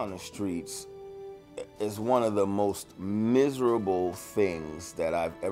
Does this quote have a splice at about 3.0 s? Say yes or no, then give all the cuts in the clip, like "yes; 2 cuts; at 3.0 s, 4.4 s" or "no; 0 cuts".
no; 0 cuts